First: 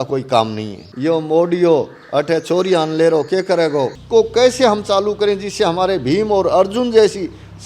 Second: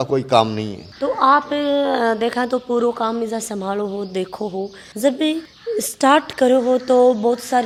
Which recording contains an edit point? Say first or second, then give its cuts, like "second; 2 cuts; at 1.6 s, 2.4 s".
first; 2 cuts; at 0.9 s, 4.0 s